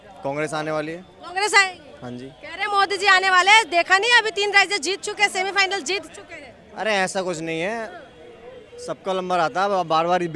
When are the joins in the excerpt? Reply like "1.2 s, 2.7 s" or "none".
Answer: none